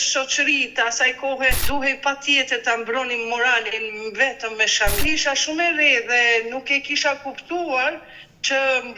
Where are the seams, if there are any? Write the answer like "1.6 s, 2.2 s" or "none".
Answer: 1.6 s, 5.0 s